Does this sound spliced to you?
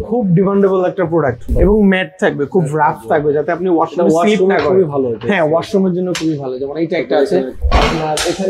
yes; 2 cuts; at 1.5 s, 7.6 s

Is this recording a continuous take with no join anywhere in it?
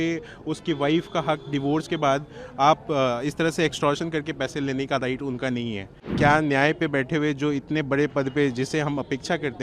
no; 1 cut; at 6.0 s

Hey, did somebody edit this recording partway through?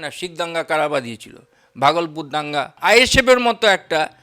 yes; 1 cut; at 2.8 s

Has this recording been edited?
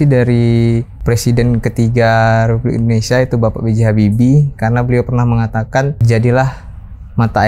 yes; 2 cuts; at 0.9 s, 6.0 s

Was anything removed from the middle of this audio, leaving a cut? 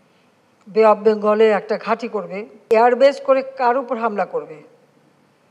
yes; 1 cut; at 2.7 s

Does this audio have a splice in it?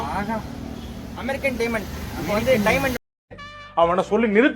yes; 1 cut; at 3.0 s

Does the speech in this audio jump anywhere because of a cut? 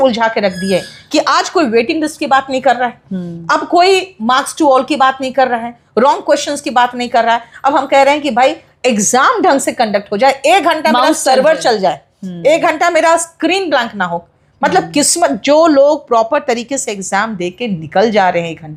no; 0 cuts

